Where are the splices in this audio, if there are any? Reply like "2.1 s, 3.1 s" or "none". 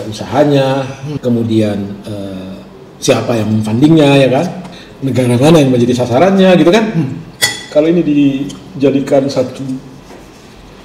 1.1 s, 4.6 s